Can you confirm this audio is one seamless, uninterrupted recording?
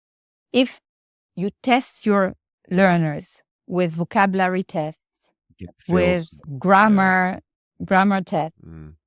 yes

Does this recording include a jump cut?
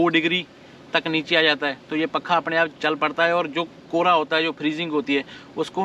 no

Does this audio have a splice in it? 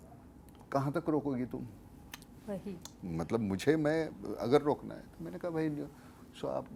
no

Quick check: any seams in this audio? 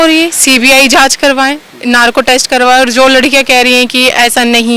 no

